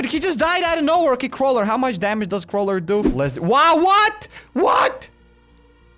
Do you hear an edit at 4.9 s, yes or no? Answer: no